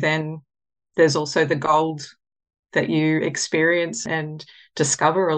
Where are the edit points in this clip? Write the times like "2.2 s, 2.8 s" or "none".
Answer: 0.9 s, 4.0 s